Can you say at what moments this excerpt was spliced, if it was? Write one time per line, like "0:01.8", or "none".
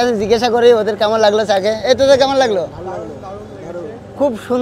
none